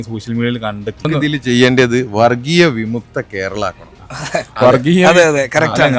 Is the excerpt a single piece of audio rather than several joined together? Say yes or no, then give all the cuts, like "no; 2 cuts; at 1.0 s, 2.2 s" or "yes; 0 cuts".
no; 1 cut; at 1.1 s